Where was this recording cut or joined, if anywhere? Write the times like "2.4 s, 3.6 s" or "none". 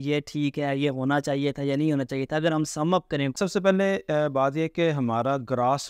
3.4 s